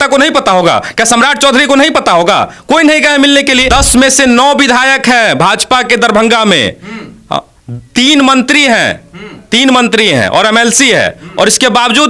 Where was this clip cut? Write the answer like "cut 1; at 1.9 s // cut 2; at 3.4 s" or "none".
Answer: cut 1; at 3.7 s